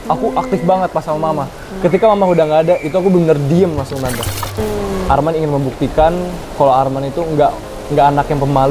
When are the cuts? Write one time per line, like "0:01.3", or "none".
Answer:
0:04.6